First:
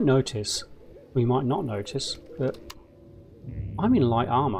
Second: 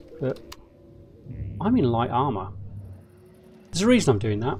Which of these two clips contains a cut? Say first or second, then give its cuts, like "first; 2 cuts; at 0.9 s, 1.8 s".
second; 1 cut; at 3.7 s